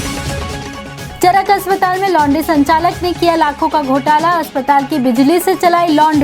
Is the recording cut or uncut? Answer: cut